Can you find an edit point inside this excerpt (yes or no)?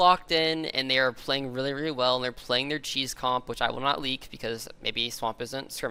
no